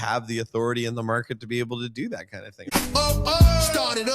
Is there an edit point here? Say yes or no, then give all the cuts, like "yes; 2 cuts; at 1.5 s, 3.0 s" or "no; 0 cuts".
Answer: yes; 1 cut; at 2.6 s